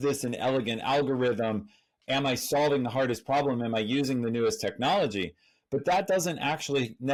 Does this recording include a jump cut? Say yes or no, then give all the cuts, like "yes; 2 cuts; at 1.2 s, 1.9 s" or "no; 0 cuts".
no; 0 cuts